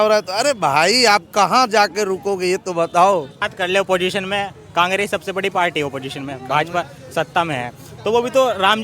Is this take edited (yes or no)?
yes